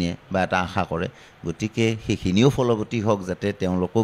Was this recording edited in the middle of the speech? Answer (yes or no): no